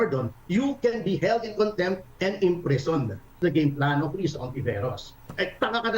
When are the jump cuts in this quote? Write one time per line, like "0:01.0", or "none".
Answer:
0:03.4